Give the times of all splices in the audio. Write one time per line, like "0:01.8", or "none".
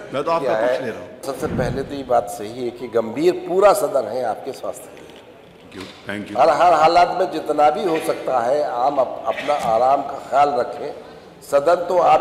0:01.2